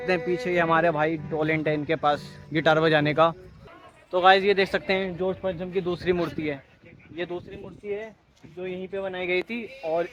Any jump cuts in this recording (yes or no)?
no